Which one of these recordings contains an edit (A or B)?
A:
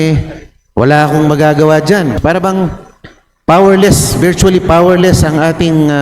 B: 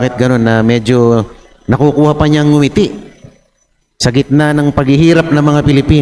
A